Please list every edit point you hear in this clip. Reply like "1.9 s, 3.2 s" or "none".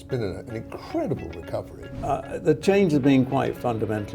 1.9 s